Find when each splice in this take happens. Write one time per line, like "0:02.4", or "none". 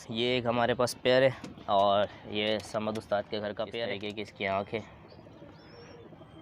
0:04.0